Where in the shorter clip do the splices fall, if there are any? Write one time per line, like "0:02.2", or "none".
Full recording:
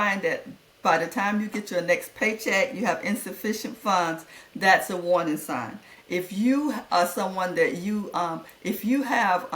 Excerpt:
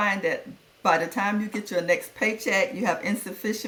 none